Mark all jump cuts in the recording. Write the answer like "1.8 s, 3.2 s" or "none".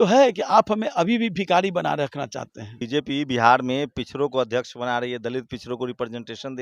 2.8 s